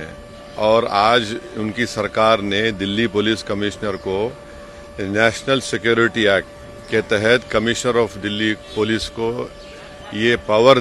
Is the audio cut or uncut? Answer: uncut